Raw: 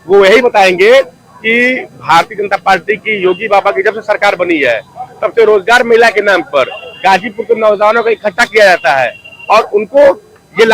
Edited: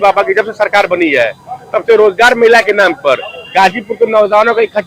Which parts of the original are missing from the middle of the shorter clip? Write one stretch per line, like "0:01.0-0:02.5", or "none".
none